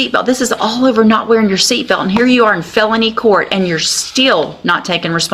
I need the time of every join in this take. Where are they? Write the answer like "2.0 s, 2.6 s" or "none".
none